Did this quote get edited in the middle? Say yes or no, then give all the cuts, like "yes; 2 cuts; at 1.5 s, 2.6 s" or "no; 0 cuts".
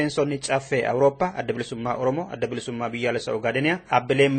no; 0 cuts